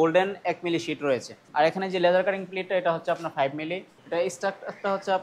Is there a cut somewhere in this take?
yes; 2 cuts; at 1.4 s, 4.0 s

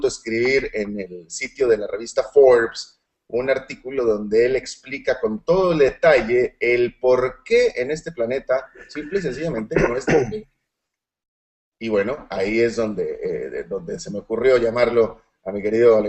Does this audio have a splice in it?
yes; 1 cut; at 9.7 s

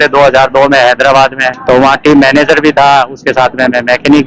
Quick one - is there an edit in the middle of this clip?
no; 0 cuts

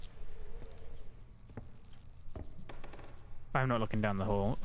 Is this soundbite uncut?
no; 1 cut; at 1.1 s

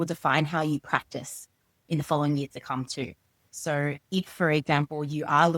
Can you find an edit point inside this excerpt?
no; 0 cuts

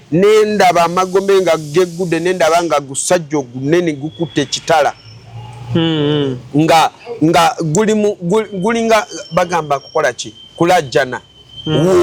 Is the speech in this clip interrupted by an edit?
no; 0 cuts

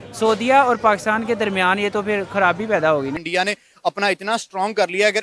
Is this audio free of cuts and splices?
no; 1 cut; at 3.2 s

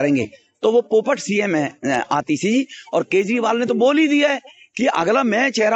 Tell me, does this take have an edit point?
no; 0 cuts

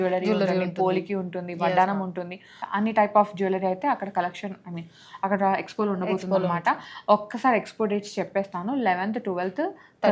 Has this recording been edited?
no; 0 cuts

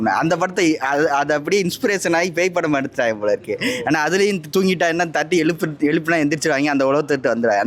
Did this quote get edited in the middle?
no; 0 cuts

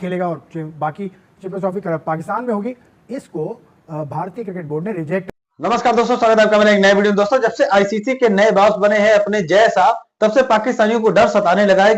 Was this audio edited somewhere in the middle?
no; 0 cuts

